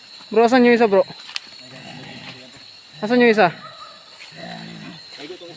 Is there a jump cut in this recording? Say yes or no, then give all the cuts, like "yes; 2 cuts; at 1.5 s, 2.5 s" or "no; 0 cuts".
no; 0 cuts